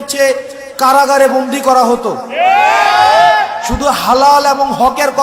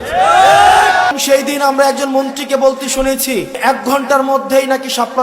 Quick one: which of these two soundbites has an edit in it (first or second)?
second